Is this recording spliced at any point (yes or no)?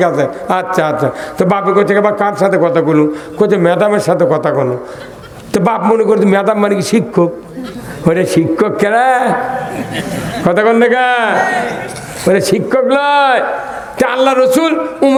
no